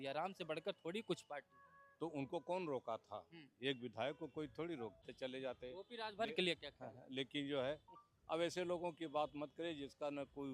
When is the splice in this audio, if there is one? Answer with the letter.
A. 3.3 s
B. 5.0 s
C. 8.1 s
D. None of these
B